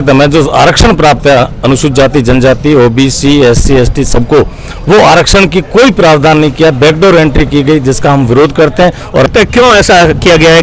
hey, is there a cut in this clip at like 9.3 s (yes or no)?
yes